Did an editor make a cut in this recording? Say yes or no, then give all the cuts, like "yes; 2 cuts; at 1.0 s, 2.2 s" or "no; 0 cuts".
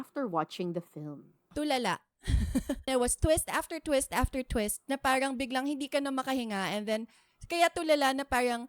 yes; 1 cut; at 2.9 s